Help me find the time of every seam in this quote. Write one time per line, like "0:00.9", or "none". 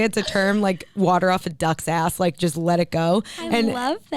none